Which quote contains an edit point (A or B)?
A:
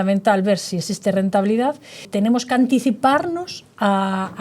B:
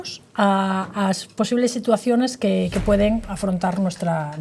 A